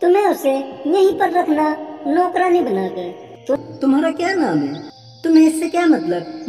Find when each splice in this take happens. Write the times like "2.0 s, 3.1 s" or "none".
3.6 s